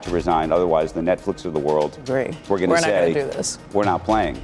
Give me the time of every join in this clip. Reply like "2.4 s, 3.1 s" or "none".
2.4 s